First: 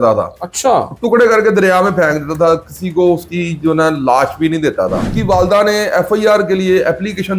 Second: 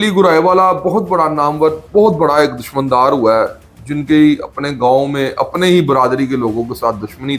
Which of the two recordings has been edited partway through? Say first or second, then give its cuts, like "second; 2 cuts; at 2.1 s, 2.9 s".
first; 1 cut; at 5.1 s